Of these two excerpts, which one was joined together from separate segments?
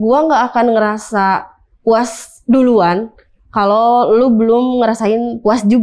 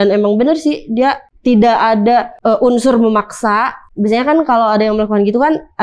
second; 3 cuts; at 1.3 s, 2.3 s, 3.8 s

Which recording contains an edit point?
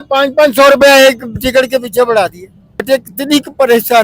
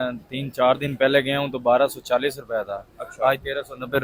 first; 1 cut; at 2.8 s

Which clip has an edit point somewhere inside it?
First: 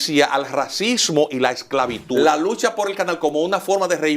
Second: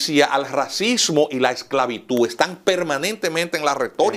first; 1 cut; at 2.0 s

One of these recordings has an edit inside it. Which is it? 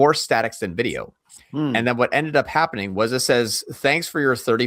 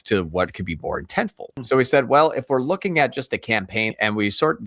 second; 2 cuts; at 1.6 s, 3.9 s

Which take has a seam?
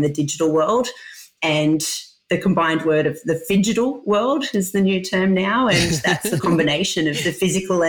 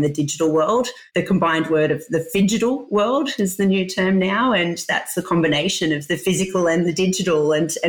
second; 1 cut; at 1.0 s

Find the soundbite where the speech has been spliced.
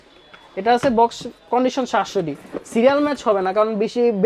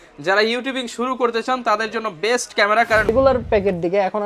second; 1 cut; at 3.1 s

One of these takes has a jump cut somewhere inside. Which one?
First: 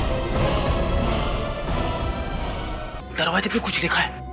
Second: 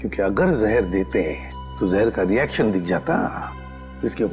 first; 1 cut; at 3.0 s

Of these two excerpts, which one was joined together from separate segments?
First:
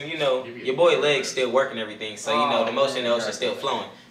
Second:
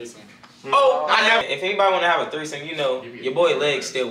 second; 1 cut; at 1.4 s

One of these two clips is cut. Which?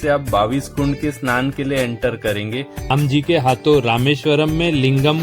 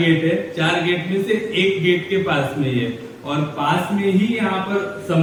first; 1 cut; at 2.9 s

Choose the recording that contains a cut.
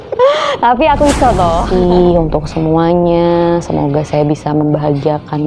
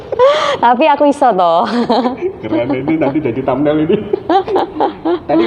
first; 1 cut; at 1.7 s

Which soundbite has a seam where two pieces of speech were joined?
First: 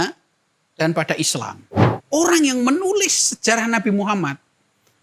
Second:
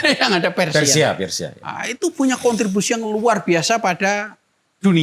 first; 1 cut; at 1.9 s

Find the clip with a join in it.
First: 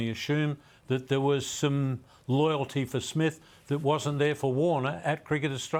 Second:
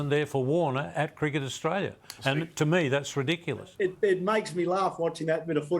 second; 1 cut; at 3.7 s

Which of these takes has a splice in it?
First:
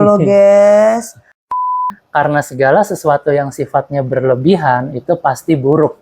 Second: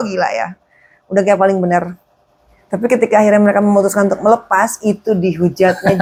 first; 1 cut; at 1.7 s

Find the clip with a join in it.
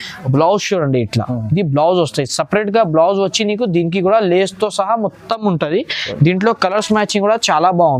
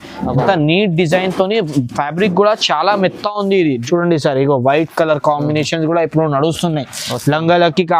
second; 1 cut; at 3.8 s

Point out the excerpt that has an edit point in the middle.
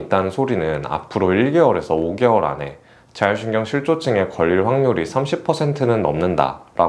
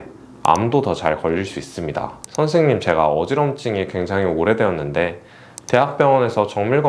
second; 1 cut; at 2.2 s

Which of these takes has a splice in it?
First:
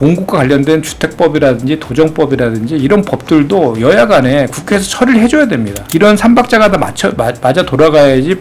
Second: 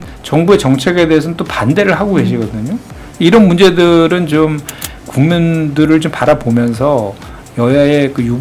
first; 1 cut; at 5.8 s

